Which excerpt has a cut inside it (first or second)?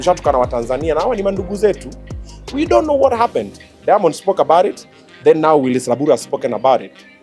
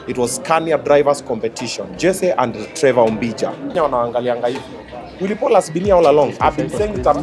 second